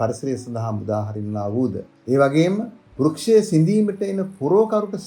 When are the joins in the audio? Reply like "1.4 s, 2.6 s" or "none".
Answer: 1.9 s, 2.8 s